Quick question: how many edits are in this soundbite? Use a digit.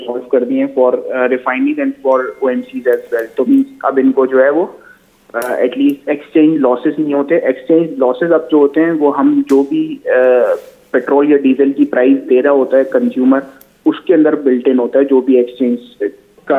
0